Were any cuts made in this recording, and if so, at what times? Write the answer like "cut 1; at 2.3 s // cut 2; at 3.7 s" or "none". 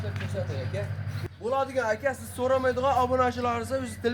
cut 1; at 1.2 s